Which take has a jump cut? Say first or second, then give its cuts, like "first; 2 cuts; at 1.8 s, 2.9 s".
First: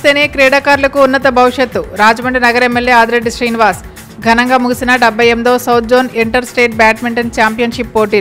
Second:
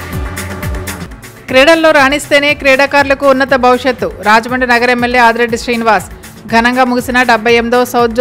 second; 1 cut; at 1.0 s